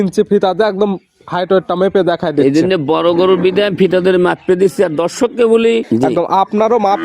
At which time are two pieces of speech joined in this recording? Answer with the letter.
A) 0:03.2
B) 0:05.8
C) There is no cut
B